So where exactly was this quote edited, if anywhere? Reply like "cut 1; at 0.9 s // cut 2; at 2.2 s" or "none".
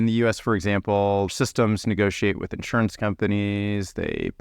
cut 1; at 1.3 s